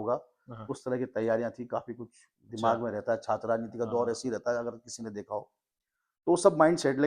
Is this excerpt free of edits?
yes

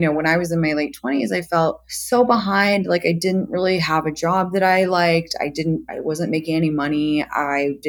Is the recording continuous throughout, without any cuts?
no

